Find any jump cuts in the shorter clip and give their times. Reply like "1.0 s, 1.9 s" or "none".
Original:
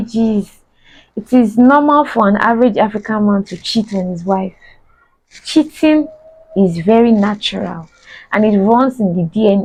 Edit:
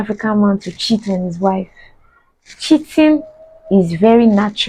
none